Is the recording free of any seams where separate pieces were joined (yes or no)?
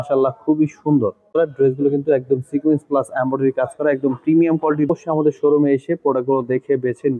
no